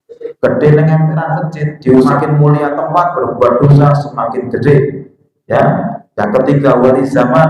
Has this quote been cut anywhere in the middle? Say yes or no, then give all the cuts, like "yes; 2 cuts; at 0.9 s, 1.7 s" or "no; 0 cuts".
yes; 1 cut; at 2.1 s